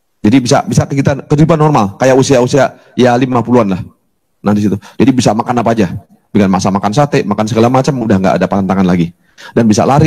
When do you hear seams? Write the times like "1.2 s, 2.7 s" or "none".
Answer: none